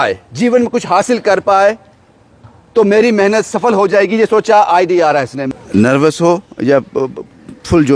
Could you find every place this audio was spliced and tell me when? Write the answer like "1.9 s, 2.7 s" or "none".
5.4 s